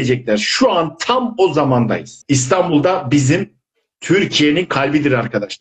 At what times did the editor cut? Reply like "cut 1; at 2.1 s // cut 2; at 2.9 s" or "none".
cut 1; at 2.1 s

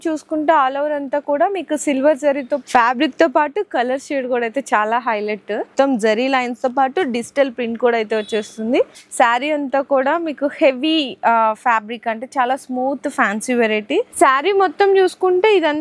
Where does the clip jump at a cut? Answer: cut 1; at 2.6 s // cut 2; at 5.7 s // cut 3; at 9.0 s // cut 4; at 14.1 s

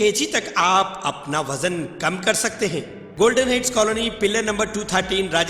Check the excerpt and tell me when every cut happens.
cut 1; at 3.0 s

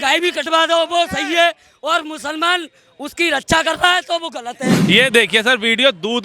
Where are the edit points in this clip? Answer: cut 1; at 4.8 s

